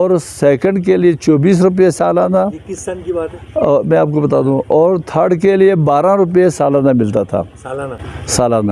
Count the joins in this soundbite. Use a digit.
0